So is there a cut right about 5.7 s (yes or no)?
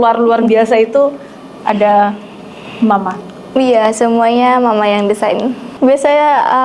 yes